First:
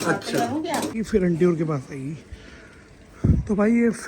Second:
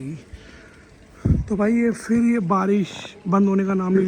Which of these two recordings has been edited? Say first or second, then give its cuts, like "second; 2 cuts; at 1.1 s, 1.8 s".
first; 1 cut; at 1.0 s